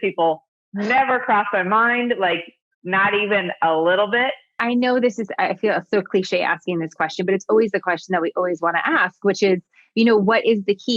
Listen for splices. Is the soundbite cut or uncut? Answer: cut